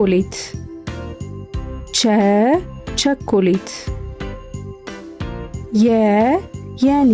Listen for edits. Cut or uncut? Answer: cut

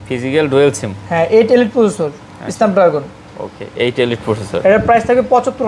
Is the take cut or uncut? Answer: uncut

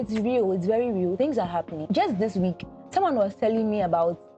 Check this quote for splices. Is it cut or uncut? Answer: cut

